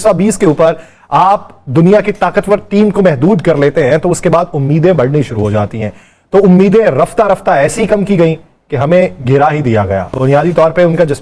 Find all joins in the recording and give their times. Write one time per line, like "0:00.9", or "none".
none